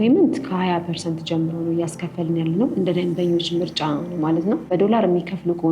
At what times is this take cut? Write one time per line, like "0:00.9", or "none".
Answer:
0:04.7